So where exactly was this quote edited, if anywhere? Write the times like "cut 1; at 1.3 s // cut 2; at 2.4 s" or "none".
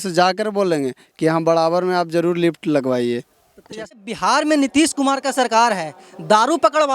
cut 1; at 3.9 s